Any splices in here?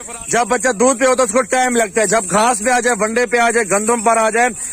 no; 0 cuts

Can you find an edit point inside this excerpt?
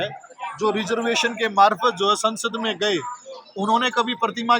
no; 0 cuts

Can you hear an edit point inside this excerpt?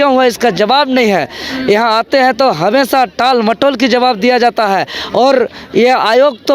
no; 0 cuts

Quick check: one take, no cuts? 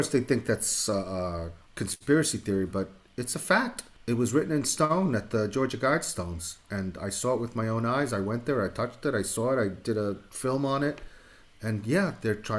no; 2 cuts; at 1.6 s, 3.9 s

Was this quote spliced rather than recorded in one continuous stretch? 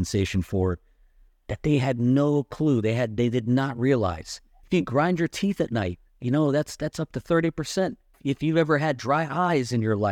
yes; 2 cuts; at 4.6 s, 8.1 s

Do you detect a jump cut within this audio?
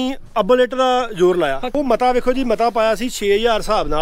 yes; 1 cut; at 1.8 s

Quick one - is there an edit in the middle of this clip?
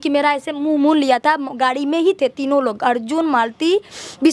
no; 0 cuts

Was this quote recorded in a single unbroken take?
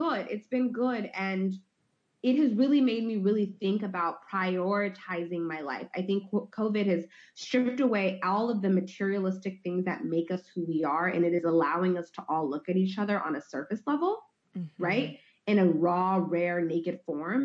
yes; 0 cuts

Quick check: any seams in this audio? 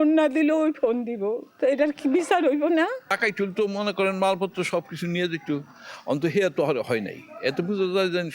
yes; 2 cuts; at 1.5 s, 3.2 s

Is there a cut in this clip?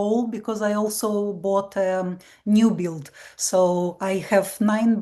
no; 0 cuts

